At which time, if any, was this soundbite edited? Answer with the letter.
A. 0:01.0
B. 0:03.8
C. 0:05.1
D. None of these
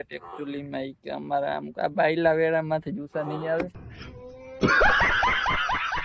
B